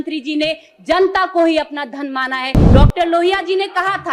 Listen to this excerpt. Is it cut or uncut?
cut